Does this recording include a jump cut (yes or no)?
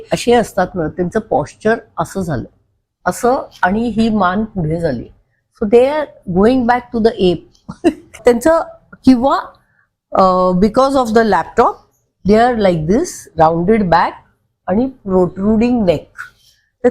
no